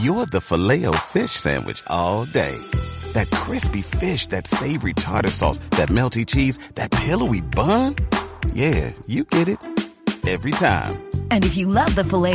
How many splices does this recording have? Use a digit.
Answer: 0